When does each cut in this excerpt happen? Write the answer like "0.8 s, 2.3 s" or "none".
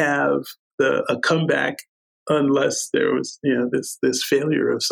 none